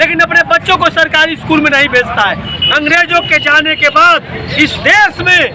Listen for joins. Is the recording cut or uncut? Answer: cut